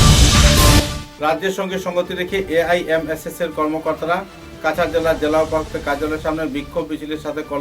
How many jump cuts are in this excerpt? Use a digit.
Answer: 1